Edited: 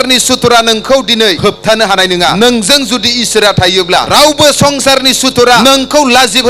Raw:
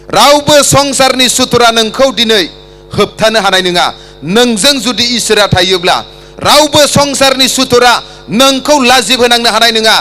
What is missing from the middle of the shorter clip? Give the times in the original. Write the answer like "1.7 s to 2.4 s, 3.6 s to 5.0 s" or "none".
2.5 s to 2.9 s, 3.9 s to 4.3 s, 6.0 s to 6.4 s, 7.9 s to 8.3 s